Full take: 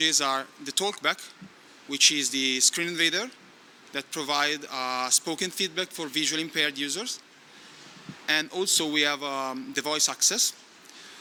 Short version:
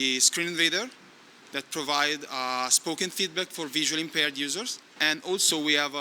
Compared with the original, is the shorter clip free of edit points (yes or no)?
no